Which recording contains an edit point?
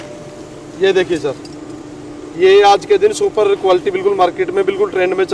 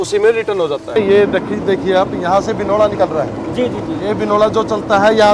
second; 1 cut; at 1.0 s

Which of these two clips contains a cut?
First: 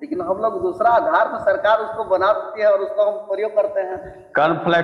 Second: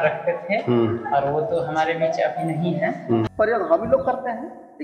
second; 1 cut; at 3.3 s

